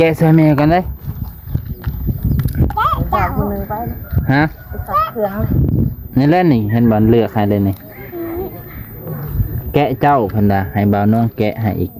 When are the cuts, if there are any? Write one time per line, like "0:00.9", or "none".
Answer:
none

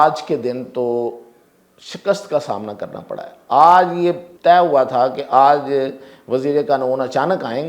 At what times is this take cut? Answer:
0:04.3

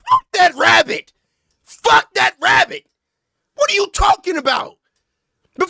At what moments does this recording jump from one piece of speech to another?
none

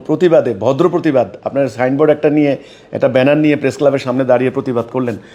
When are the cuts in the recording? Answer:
none

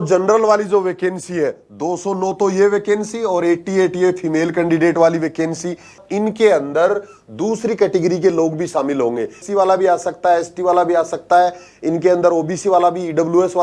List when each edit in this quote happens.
0:06.0
0:09.4

